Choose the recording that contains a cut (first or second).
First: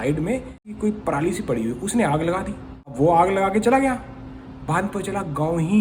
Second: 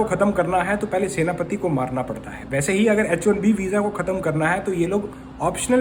first